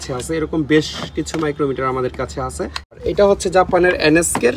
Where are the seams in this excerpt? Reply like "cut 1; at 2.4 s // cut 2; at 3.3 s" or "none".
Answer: cut 1; at 3.0 s